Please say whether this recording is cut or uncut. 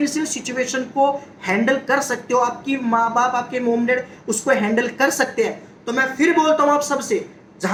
uncut